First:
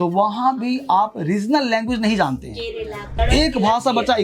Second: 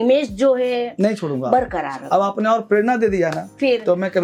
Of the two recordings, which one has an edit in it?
first; 1 cut; at 3.1 s

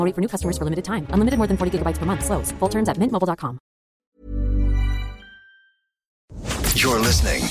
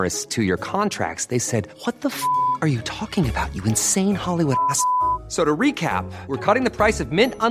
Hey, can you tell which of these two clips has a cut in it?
first; 2 cuts; at 4.1 s, 6.3 s

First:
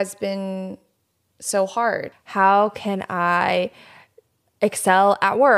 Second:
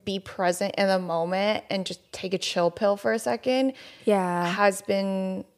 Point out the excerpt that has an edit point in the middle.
first; 1 cut; at 2.2 s

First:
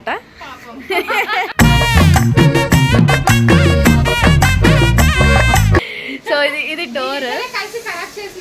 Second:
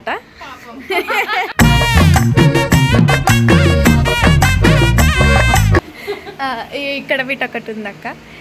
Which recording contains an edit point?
second; 1 cut; at 5.9 s

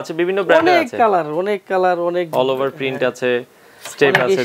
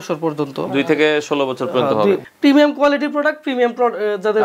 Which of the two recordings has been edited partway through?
second; 1 cut; at 2.2 s

